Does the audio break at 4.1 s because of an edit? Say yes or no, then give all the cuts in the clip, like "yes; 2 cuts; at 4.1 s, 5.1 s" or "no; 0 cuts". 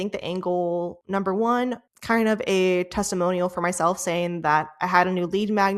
no; 2 cuts; at 1.0 s, 1.9 s